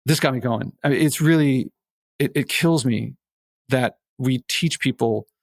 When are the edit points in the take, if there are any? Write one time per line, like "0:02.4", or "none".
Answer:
none